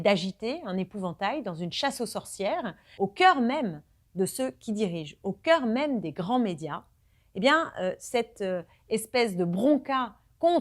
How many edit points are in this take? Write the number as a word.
one